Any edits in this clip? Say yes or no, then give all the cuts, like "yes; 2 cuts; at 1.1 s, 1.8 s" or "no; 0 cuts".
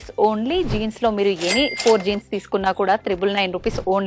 no; 0 cuts